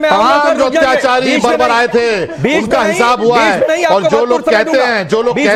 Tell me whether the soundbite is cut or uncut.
uncut